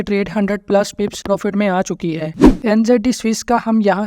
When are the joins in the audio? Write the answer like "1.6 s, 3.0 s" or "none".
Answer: 1.2 s, 2.4 s